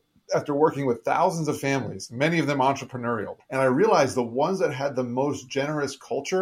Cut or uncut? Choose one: cut